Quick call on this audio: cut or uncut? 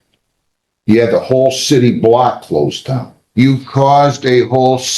cut